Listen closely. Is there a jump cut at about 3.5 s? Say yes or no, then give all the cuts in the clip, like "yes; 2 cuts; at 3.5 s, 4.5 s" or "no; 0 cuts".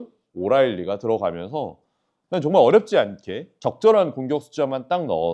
yes; 1 cut; at 3.5 s